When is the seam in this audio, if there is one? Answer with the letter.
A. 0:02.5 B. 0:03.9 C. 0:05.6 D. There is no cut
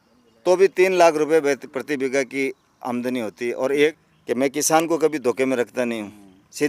B